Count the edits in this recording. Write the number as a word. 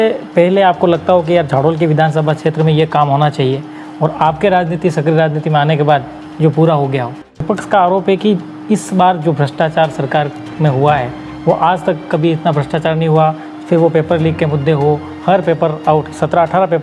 one